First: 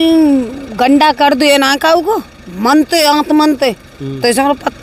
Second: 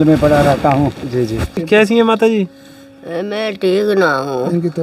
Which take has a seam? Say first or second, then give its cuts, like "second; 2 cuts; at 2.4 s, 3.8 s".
second; 1 cut; at 1.6 s